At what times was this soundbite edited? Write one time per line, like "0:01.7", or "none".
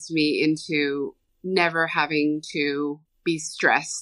0:01.3
0:03.1